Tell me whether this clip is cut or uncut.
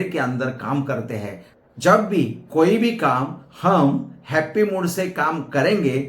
cut